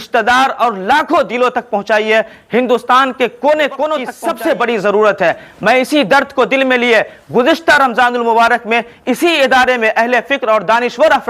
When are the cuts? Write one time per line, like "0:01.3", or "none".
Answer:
0:04.2

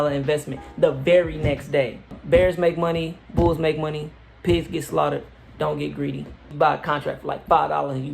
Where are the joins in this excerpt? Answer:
0:02.2
0:06.5

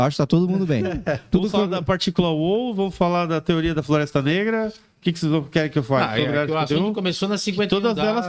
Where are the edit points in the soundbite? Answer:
none

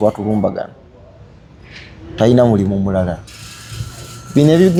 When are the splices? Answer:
none

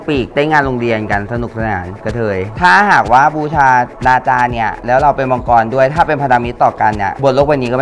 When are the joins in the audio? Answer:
0:02.5

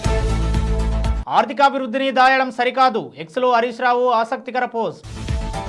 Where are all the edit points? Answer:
none

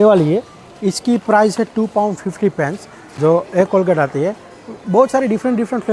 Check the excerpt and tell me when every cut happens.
none

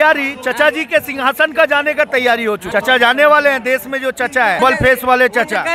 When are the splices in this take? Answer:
0:02.6
0:04.6

